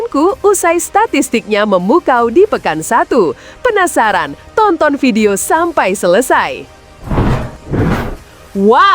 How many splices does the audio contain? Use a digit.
1